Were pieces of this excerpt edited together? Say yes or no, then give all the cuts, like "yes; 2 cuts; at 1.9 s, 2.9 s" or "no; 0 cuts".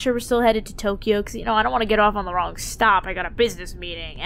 no; 0 cuts